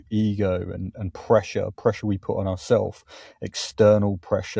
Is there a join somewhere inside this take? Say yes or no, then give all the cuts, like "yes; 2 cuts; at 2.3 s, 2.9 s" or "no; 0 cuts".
no; 0 cuts